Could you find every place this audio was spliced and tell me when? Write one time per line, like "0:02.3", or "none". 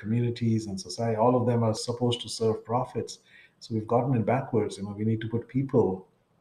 0:01.8